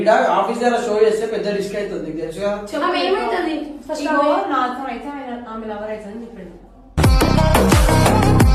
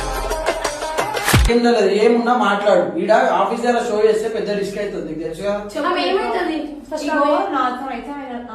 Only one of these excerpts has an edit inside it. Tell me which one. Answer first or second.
second